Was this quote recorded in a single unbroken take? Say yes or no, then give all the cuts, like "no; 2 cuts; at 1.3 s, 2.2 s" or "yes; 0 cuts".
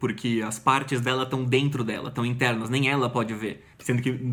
yes; 0 cuts